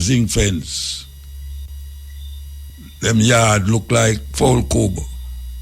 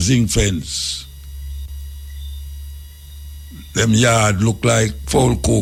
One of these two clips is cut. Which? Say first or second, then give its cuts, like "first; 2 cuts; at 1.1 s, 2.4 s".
first; 1 cut; at 2.7 s